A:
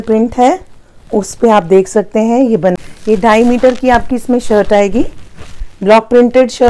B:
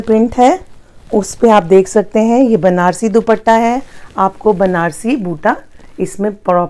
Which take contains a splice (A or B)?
A